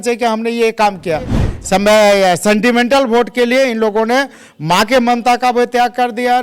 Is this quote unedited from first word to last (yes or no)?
no